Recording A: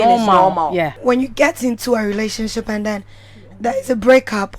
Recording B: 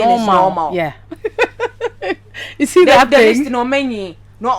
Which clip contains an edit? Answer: A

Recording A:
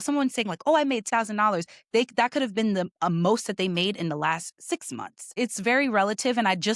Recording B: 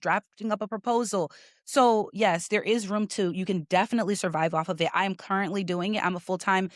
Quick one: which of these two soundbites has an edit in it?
A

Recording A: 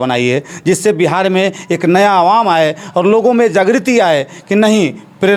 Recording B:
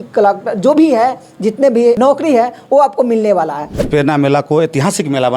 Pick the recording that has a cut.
B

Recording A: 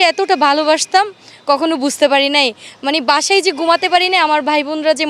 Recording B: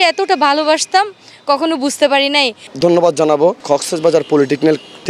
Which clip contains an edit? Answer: B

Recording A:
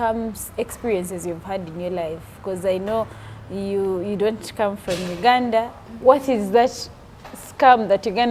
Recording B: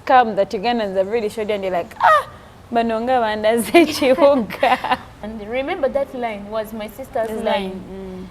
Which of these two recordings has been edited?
B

